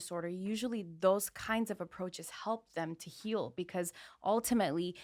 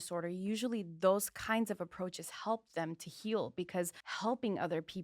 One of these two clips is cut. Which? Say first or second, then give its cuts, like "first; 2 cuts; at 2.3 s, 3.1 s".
second; 1 cut; at 4.0 s